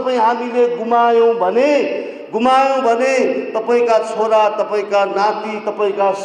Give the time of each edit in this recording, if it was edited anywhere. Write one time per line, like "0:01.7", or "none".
none

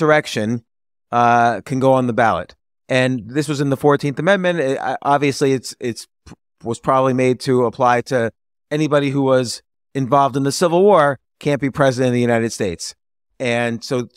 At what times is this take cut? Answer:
none

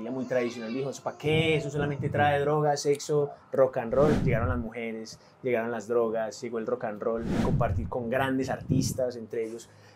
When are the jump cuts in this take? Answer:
0:04.2
0:07.3

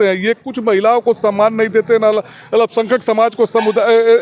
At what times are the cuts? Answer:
none

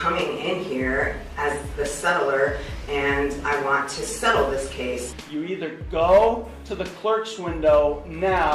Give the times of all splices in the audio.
0:05.2

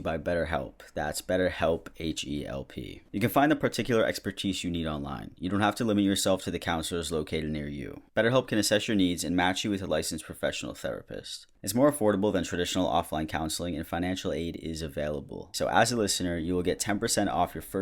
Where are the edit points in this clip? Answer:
0:03.0
0:11.5
0:15.4

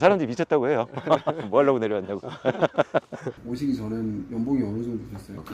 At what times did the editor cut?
0:03.2

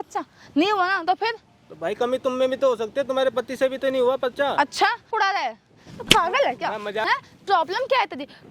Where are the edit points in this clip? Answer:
0:05.1
0:07.0

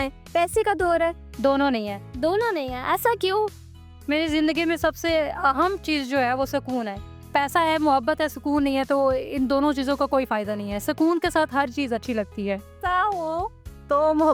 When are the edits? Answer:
0:01.3
0:07.1
0:12.7

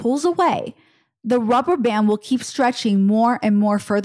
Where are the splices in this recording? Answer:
none

